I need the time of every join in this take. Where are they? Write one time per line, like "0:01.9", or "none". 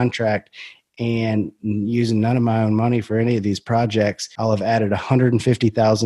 0:04.3